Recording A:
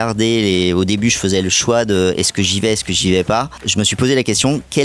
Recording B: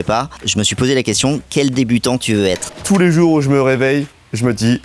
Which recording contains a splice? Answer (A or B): B